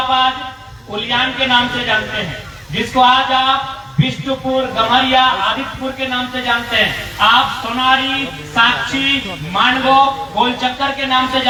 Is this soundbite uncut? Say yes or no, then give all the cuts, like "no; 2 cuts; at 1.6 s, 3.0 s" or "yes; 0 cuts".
yes; 0 cuts